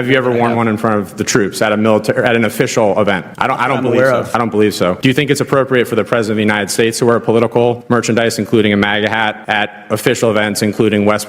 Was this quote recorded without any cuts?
no; 4 cuts; at 3.3 s, 4.7 s, 7.8 s, 9.4 s

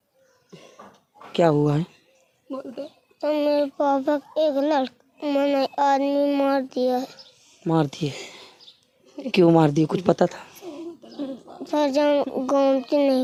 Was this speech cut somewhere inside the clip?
no; 0 cuts

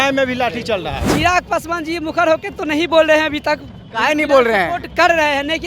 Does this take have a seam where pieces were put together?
yes; 1 cut; at 1.1 s

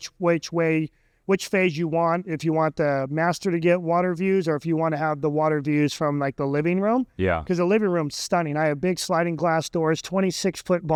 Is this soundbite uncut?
yes; 0 cuts

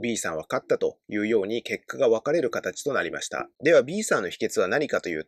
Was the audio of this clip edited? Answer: no; 0 cuts

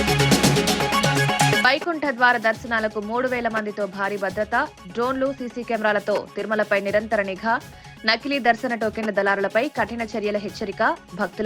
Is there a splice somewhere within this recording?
yes; 1 cut; at 1.6 s

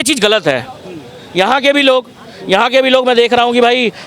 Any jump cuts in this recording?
no; 0 cuts

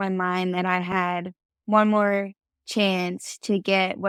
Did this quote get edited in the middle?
no; 0 cuts

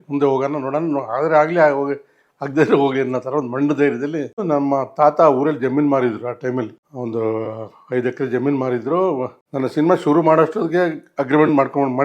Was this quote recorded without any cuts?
no; 3 cuts; at 4.4 s, 6.8 s, 9.4 s

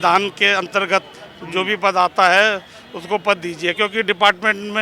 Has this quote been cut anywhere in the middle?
no; 0 cuts

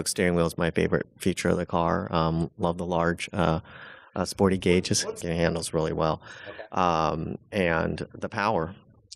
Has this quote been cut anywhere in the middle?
yes; 1 cut; at 4.9 s

